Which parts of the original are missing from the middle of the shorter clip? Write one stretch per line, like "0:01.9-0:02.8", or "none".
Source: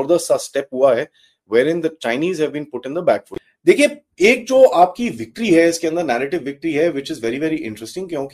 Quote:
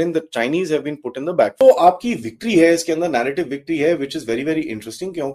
0:03.2-0:04.5